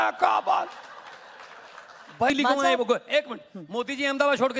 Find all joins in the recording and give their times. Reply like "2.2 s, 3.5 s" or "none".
2.3 s

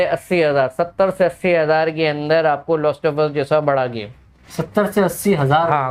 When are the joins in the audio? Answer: none

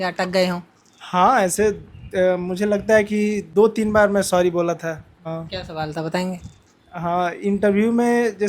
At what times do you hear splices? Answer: 3.4 s, 5.1 s

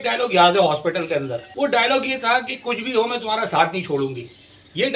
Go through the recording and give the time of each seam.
none

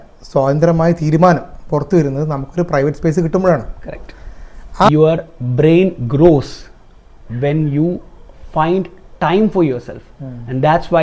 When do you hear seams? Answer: 4.9 s

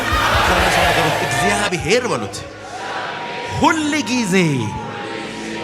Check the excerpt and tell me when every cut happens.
1.2 s

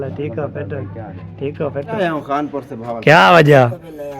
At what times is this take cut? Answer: 1.9 s

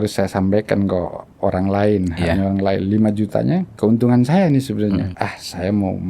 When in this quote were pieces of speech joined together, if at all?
3.7 s, 5.1 s

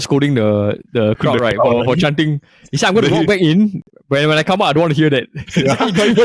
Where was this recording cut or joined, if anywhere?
none

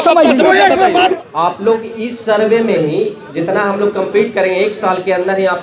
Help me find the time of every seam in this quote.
1.1 s

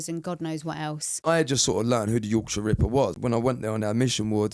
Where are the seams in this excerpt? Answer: 1.3 s, 3.2 s

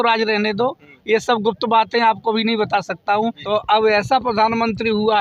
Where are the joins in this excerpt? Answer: 3.4 s

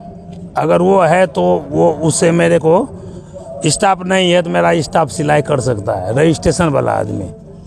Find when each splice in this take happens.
none

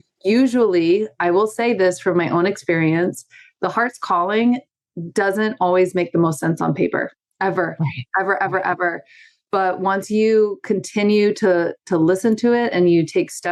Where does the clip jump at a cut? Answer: none

